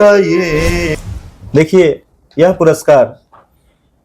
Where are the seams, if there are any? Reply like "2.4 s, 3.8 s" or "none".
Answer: 1.0 s